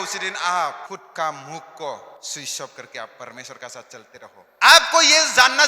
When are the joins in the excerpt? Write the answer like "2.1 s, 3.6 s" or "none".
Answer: 0.9 s, 2.2 s, 4.4 s